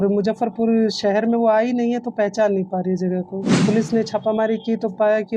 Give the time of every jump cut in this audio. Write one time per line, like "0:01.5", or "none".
0:03.6